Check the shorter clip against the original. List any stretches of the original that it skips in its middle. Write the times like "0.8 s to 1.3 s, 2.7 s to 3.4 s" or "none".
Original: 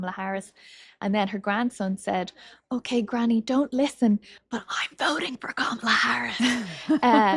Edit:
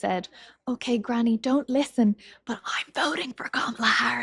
none